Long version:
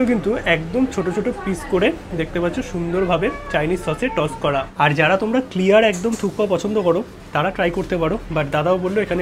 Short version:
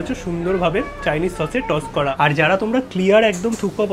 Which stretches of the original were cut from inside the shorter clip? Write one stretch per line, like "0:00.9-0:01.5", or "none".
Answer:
0:04.6-0:04.7